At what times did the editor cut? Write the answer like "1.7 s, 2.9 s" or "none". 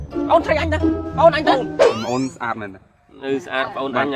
1.8 s